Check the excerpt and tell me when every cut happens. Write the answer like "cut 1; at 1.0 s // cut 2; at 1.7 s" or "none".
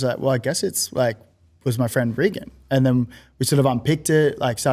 none